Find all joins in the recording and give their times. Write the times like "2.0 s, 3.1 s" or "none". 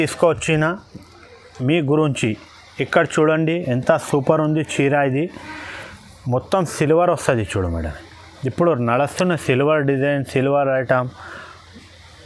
none